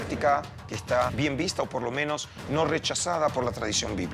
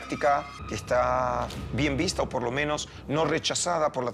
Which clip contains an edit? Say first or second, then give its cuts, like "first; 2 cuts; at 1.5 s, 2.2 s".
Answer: first; 1 cut; at 1.1 s